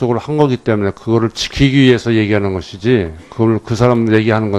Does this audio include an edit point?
yes; 1 cut; at 3.6 s

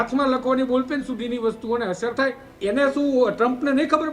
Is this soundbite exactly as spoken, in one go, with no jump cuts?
no; 1 cut; at 2.5 s

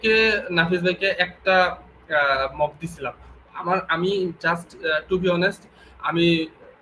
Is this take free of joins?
yes; 0 cuts

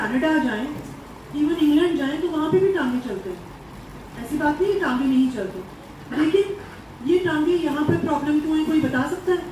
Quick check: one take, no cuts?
yes; 0 cuts

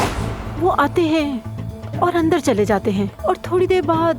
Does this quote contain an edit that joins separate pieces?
no; 0 cuts

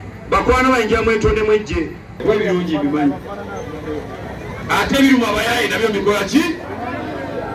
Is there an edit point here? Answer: yes; 1 cut; at 2.2 s

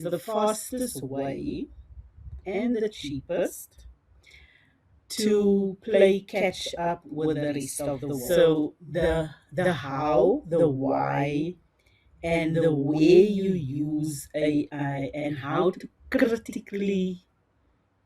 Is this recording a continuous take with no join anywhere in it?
no; 1 cut; at 8.2 s

